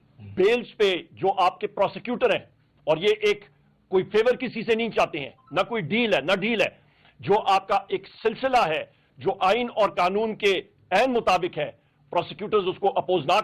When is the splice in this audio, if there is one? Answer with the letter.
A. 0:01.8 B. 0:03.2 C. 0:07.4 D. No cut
D